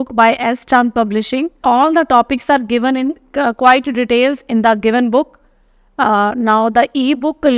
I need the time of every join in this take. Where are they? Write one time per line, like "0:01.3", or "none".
0:01.5